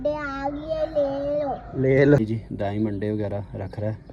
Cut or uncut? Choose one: cut